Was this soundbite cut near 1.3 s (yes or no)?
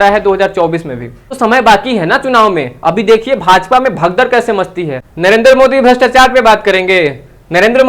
yes